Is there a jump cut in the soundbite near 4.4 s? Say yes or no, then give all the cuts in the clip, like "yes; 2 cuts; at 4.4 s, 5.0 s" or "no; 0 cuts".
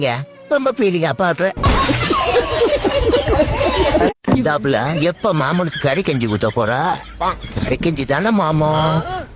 yes; 1 cut; at 4.4 s